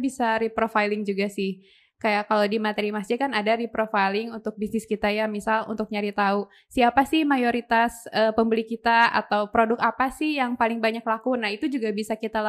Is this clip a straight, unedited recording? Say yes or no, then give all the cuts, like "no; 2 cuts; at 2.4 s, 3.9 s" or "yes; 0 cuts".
yes; 0 cuts